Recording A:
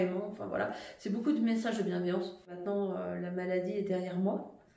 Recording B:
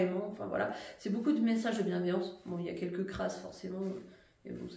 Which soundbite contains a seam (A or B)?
A